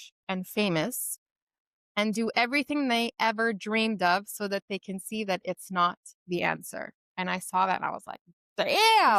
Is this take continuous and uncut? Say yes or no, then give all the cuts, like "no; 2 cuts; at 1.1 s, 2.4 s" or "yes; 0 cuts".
yes; 0 cuts